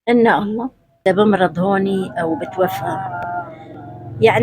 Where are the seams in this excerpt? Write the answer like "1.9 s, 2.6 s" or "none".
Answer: 0.9 s